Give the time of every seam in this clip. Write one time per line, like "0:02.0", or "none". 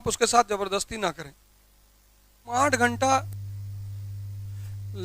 0:02.5

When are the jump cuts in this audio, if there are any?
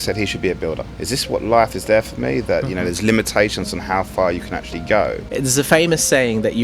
0:00.9
0:05.2

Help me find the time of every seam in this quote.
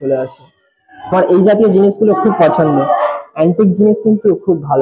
0:01.1

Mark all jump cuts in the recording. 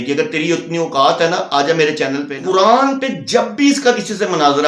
0:02.3

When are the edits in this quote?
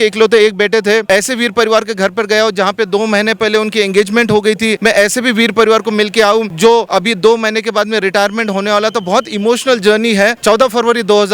0:01.0
0:04.8
0:06.7
0:10.4

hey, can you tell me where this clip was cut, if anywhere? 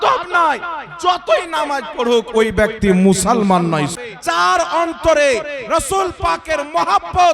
0:03.9

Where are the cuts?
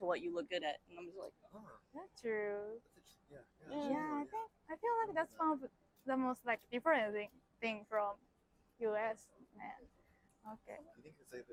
none

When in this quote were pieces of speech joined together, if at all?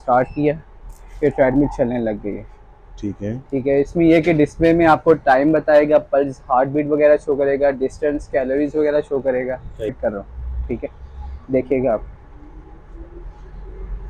0:09.9

